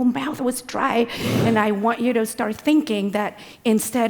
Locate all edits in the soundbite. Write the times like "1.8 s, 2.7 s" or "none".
1.3 s